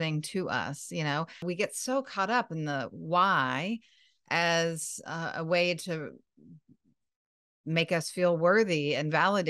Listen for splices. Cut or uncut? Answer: cut